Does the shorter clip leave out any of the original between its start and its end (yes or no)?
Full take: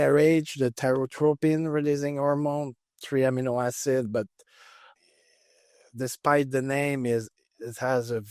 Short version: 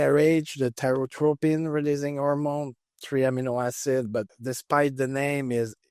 yes